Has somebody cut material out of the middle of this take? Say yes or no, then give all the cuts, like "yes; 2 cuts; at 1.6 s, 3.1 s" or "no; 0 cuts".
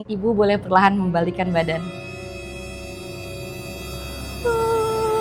no; 0 cuts